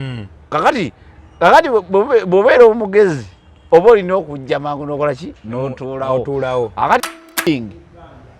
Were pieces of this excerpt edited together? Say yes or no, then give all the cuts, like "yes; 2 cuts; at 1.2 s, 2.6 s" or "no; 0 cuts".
yes; 1 cut; at 7.3 s